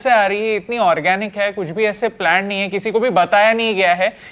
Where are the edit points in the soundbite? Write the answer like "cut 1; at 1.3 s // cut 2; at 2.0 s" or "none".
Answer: none